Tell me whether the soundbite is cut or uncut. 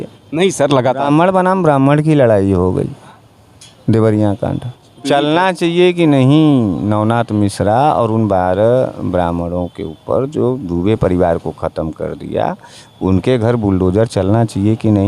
cut